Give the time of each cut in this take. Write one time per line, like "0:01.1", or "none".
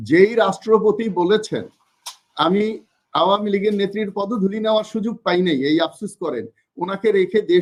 none